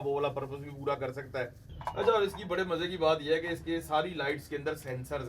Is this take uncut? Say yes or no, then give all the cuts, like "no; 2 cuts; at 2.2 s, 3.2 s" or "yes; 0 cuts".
no; 1 cut; at 1.7 s